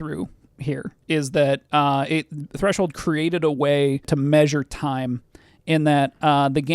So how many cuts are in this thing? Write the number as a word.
two